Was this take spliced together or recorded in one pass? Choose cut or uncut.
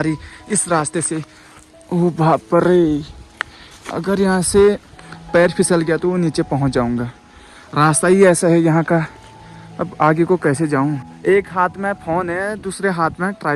uncut